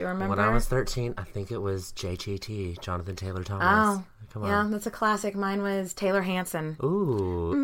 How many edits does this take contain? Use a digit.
1